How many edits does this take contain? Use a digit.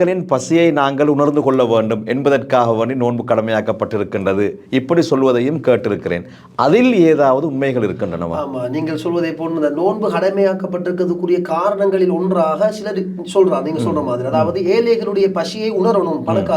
0